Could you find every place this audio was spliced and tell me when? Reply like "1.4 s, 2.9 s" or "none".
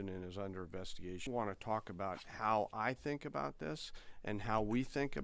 1.3 s